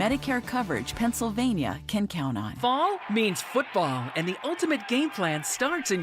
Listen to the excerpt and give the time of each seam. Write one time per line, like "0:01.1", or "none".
0:02.5